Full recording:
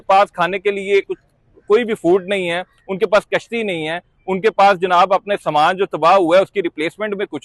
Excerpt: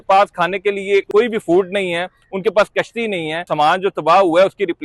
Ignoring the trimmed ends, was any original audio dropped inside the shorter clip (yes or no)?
yes